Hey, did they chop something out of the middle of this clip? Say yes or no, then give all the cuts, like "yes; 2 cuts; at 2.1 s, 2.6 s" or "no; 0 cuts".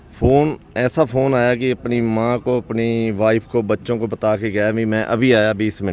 no; 0 cuts